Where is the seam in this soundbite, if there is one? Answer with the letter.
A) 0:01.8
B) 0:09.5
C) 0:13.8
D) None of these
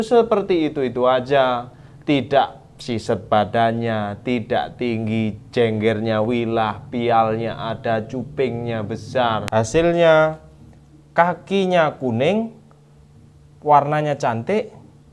B